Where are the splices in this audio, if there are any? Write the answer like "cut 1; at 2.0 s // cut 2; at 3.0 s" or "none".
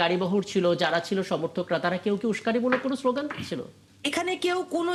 none